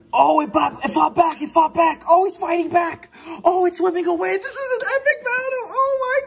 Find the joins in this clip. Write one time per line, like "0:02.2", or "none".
none